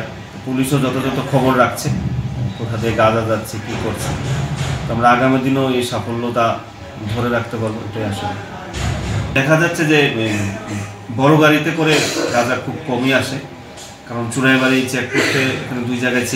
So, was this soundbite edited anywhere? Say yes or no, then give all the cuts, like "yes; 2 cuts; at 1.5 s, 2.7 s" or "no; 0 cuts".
no; 0 cuts